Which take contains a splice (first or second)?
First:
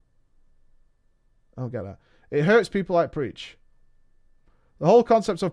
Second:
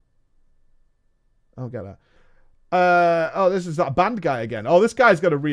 second